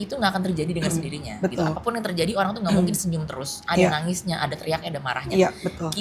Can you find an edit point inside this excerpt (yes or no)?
no